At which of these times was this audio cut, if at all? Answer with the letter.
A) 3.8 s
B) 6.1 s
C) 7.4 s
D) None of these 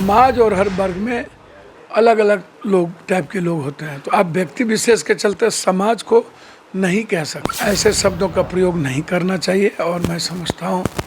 C